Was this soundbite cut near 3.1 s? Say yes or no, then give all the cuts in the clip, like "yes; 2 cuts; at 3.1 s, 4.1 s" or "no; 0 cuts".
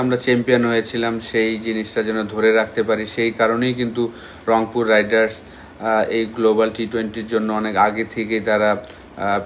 no; 0 cuts